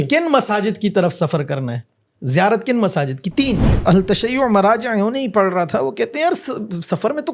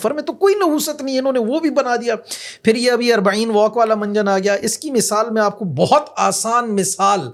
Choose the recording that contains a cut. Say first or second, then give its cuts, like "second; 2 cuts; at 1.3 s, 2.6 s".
first; 1 cut; at 3.8 s